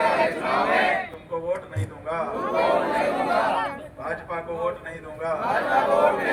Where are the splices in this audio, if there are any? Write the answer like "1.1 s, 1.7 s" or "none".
none